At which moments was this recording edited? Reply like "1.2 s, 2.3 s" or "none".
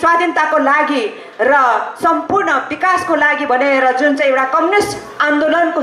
none